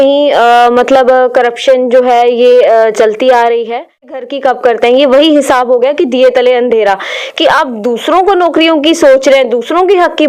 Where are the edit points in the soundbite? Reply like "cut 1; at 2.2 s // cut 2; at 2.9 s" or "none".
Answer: cut 1; at 4.3 s